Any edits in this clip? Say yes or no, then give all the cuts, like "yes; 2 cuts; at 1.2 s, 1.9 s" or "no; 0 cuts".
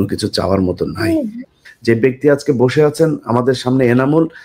yes; 1 cut; at 1.6 s